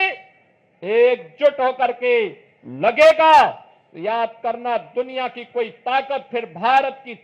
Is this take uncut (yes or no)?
yes